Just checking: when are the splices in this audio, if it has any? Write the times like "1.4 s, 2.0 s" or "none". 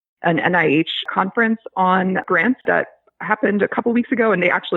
1.1 s, 2.6 s